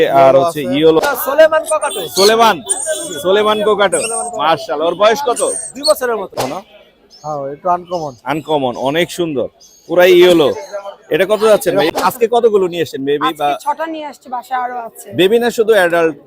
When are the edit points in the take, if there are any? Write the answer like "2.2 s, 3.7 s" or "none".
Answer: 1.0 s, 6.4 s, 11.9 s